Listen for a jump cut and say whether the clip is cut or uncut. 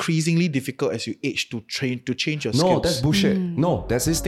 uncut